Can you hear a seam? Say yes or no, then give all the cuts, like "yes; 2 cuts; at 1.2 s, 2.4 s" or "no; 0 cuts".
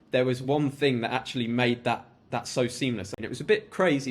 yes; 1 cut; at 3.1 s